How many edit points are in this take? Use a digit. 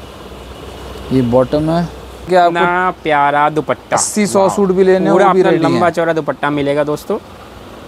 1